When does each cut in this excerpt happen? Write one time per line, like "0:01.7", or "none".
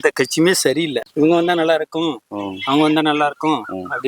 0:01.0